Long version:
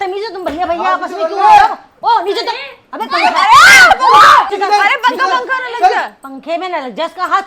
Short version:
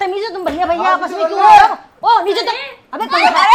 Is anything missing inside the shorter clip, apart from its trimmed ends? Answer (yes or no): no